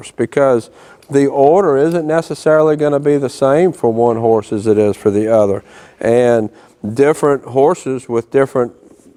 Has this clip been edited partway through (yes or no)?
no